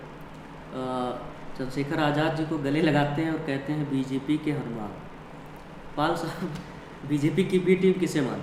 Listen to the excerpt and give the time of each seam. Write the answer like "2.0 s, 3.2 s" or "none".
none